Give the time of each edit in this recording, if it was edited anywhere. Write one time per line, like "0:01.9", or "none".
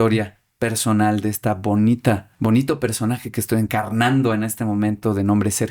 0:02.3
0:03.7